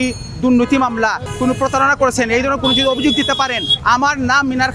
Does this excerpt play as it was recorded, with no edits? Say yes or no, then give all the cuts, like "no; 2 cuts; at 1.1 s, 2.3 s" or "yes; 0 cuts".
no; 2 cuts; at 1.3 s, 3.7 s